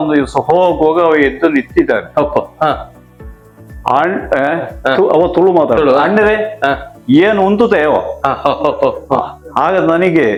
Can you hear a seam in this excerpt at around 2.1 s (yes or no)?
no